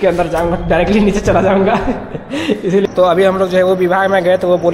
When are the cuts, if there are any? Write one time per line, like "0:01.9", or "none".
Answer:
0:02.8